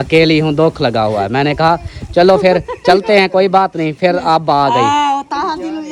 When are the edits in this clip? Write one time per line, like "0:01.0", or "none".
none